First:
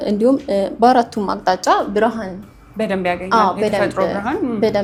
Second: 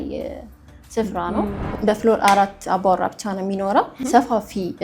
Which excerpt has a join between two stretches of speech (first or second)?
second